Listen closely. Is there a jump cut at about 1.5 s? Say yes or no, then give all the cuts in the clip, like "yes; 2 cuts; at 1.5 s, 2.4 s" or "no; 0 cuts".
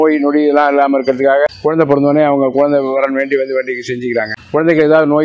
yes; 2 cuts; at 1.5 s, 4.4 s